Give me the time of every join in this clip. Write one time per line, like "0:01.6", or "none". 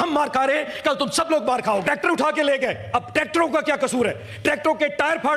0:01.8